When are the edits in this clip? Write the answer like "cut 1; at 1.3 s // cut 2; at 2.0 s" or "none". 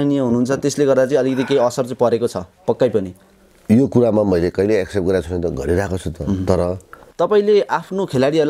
cut 1; at 7.0 s